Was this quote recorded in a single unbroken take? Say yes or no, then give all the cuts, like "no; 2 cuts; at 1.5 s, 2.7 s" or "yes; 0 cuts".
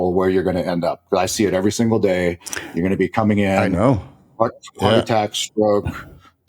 yes; 0 cuts